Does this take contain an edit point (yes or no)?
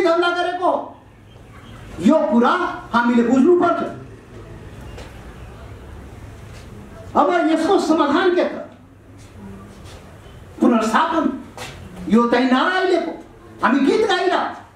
no